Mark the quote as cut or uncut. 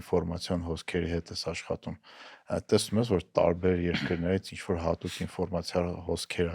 uncut